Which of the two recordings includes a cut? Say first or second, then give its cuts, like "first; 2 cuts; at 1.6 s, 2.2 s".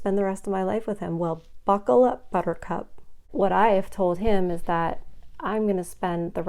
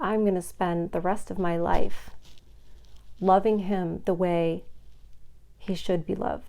first; 1 cut; at 3.3 s